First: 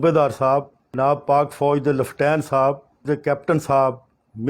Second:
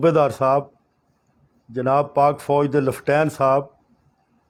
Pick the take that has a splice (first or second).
first